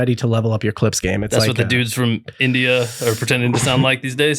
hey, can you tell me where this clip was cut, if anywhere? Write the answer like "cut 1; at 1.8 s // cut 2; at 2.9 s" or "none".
none